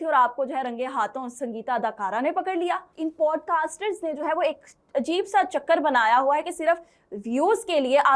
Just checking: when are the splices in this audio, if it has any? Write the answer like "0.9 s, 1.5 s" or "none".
2.9 s